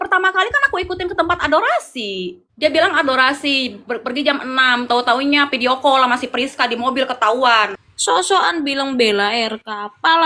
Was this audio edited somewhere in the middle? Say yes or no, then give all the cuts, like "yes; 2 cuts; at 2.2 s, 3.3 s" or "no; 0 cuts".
yes; 2 cuts; at 2.5 s, 7.8 s